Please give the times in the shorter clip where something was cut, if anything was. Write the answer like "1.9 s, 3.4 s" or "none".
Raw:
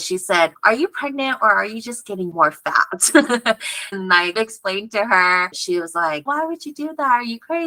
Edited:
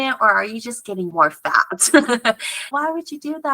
2.6 s